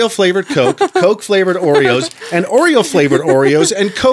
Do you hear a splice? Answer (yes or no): no